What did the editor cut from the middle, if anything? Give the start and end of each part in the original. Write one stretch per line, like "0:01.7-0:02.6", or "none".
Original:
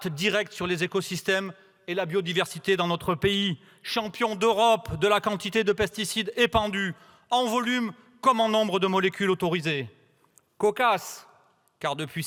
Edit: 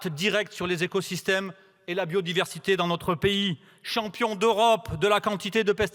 none